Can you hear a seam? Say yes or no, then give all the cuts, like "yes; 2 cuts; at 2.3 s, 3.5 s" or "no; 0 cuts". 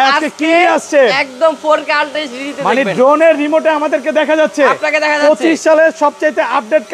no; 0 cuts